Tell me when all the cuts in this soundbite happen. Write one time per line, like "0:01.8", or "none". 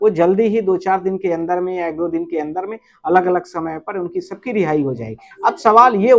none

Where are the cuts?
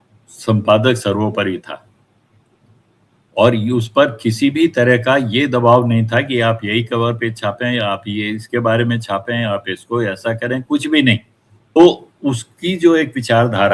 0:11.8

